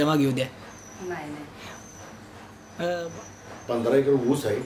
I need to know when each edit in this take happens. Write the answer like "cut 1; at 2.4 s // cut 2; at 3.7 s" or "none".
cut 1; at 3.1 s